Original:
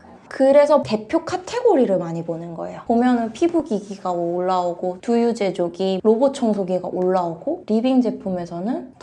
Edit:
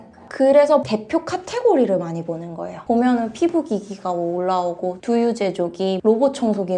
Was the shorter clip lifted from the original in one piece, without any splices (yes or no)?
yes